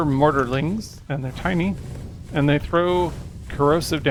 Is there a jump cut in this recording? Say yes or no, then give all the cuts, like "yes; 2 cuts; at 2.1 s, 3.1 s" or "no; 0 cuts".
no; 0 cuts